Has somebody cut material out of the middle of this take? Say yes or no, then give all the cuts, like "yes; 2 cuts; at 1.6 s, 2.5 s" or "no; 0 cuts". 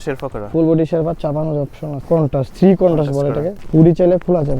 yes; 2 cuts; at 1.9 s, 3.6 s